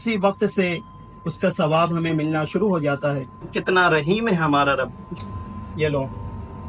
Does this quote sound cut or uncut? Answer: uncut